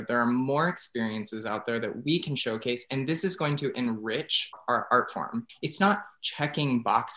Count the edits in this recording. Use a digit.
2